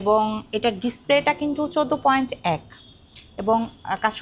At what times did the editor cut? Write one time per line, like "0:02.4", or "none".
none